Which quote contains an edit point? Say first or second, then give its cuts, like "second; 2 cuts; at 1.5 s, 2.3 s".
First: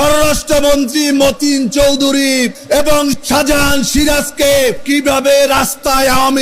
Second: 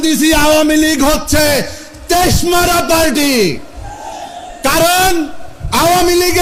first; 2 cuts; at 2.9 s, 4.8 s